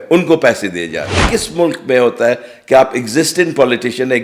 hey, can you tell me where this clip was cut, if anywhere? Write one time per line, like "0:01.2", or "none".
0:01.2